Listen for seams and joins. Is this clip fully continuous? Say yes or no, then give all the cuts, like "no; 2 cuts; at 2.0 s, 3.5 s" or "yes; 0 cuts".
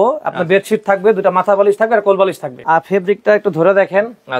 no; 1 cut; at 2.5 s